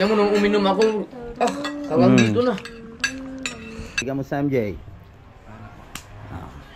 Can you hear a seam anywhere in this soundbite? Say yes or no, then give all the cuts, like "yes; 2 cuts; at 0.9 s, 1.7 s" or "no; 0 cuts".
yes; 1 cut; at 4.0 s